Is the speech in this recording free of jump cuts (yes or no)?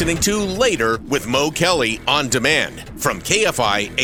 yes